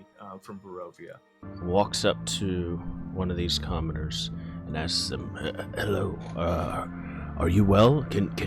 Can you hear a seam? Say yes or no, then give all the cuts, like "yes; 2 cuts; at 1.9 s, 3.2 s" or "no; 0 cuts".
yes; 1 cut; at 1.4 s